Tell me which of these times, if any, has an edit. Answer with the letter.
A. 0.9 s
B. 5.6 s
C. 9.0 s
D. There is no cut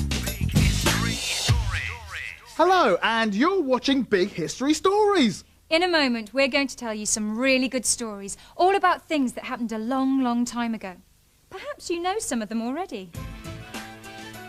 D